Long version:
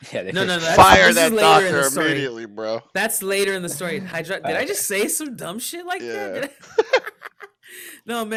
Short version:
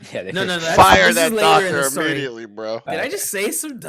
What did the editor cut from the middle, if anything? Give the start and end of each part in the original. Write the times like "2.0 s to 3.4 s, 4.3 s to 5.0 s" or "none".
2.8 s to 4.4 s